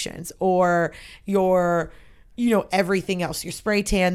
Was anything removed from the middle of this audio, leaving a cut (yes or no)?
no